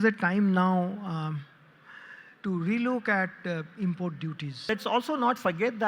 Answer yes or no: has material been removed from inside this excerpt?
yes